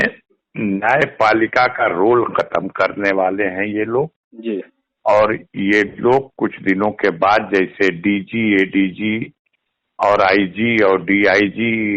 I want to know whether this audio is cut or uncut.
uncut